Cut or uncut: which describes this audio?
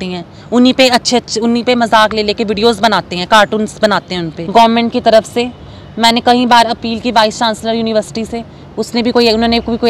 cut